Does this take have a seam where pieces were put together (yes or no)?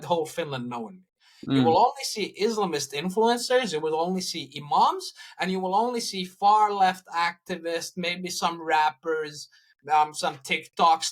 no